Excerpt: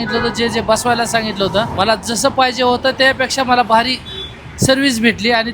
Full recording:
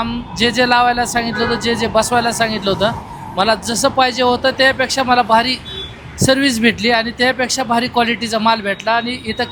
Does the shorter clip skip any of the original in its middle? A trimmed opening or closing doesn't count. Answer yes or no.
yes